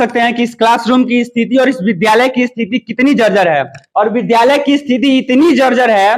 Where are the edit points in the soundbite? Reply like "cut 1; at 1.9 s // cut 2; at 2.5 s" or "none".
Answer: cut 1; at 3.8 s